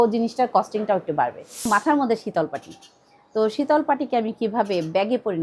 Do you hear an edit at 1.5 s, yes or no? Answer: yes